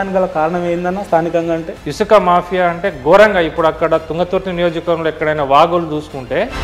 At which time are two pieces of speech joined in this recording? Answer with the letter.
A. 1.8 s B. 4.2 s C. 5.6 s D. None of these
A